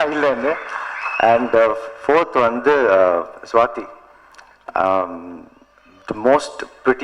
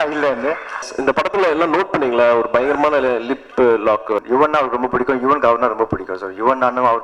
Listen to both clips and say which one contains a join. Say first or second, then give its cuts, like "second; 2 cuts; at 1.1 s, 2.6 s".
second; 2 cuts; at 0.9 s, 4.2 s